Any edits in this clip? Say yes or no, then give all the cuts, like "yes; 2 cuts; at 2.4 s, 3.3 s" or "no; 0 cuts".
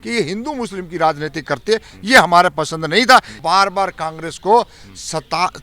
yes; 1 cut; at 3.4 s